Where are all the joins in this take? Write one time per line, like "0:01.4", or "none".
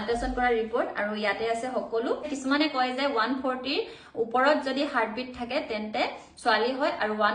0:02.3